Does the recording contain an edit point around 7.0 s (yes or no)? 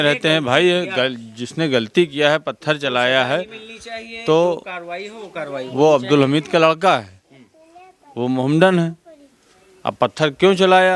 no